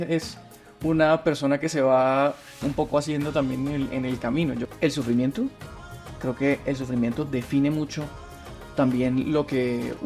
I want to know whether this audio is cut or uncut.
cut